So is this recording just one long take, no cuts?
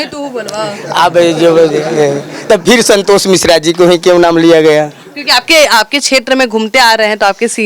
yes; 0 cuts

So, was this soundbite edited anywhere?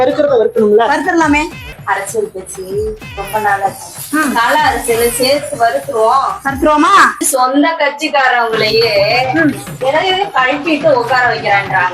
yes; 2 cuts; at 1.7 s, 7.2 s

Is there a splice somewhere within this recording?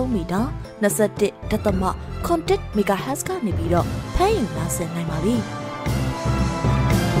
yes; 1 cut; at 5.5 s

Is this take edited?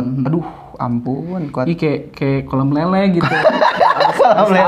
no; 0 cuts

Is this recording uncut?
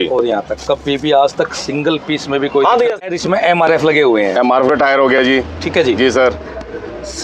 no; 1 cut; at 3.0 s

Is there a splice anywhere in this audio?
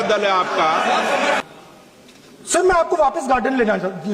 yes; 1 cut; at 1.4 s

